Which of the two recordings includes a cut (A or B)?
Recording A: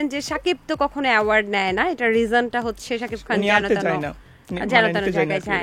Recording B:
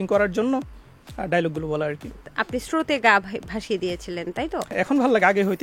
B